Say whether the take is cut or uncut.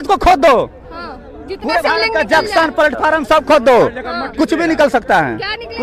uncut